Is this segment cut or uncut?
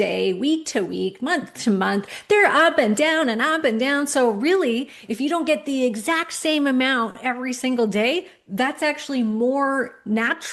uncut